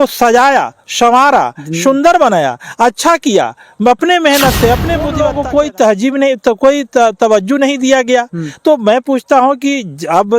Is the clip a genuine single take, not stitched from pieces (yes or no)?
no